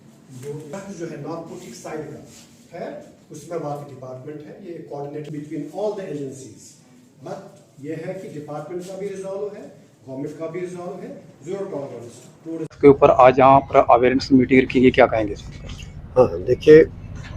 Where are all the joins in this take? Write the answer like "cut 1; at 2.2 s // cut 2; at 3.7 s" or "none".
cut 1; at 0.7 s // cut 2; at 5.3 s // cut 3; at 12.6 s